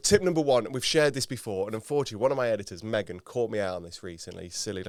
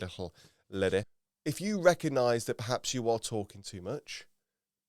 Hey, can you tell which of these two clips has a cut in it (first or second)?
second